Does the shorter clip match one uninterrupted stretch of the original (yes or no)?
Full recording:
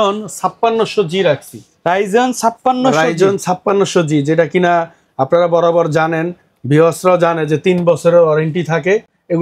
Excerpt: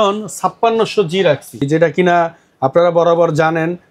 no